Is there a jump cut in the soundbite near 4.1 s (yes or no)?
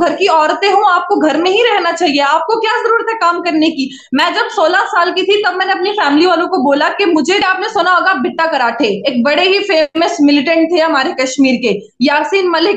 no